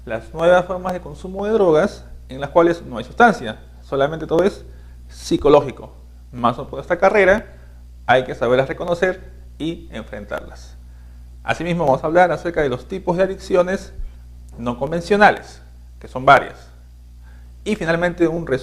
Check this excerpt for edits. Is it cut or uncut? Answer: cut